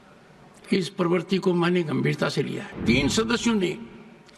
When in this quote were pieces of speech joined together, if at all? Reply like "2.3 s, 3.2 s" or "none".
2.8 s